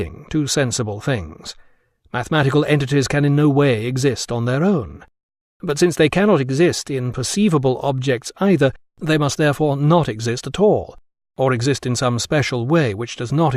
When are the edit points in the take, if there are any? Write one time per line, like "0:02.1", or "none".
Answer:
none